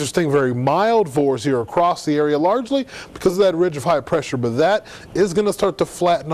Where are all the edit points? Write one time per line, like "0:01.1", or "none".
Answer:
none